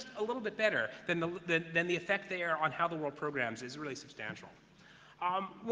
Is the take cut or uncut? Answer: uncut